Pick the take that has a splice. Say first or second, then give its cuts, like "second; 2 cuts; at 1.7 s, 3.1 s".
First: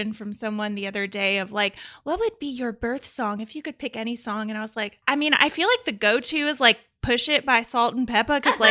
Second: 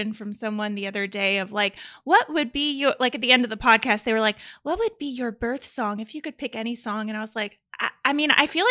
first; 2 cuts; at 1.9 s, 5.0 s